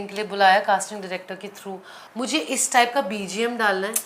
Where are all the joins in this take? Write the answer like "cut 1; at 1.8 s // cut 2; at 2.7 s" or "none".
cut 1; at 2.0 s